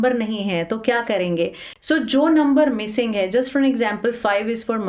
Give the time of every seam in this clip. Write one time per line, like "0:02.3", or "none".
none